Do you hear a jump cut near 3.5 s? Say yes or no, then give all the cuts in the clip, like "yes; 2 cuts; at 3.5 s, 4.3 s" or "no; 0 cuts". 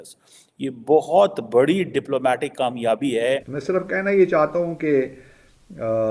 yes; 1 cut; at 3.5 s